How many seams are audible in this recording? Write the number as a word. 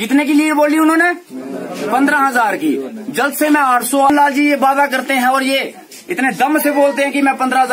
one